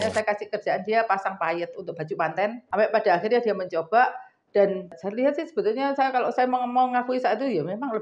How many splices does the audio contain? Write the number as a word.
two